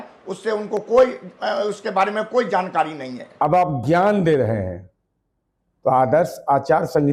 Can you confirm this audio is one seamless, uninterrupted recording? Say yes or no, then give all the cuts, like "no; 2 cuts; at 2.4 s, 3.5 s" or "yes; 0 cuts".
no; 1 cut; at 3.2 s